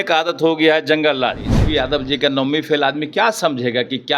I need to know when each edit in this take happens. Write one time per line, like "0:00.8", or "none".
0:01.5